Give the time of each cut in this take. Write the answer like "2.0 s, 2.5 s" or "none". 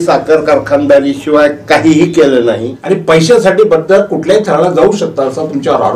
2.7 s